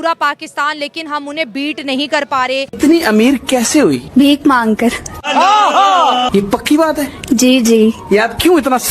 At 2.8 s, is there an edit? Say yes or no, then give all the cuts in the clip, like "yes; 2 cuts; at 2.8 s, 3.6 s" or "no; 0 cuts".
yes; 1 cut; at 2.8 s